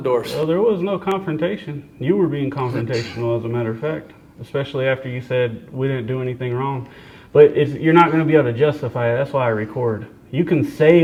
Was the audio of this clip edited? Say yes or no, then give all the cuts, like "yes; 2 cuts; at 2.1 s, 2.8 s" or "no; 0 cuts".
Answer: no; 0 cuts